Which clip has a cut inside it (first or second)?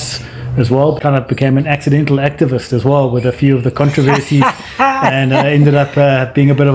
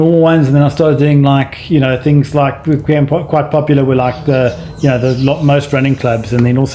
first